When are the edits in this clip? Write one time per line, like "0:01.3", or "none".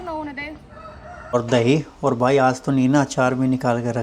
0:01.3